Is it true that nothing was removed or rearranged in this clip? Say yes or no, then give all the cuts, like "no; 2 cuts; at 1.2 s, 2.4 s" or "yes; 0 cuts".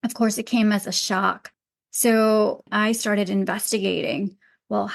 no; 1 cut; at 2.7 s